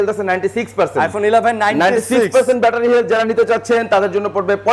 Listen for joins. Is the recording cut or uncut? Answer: uncut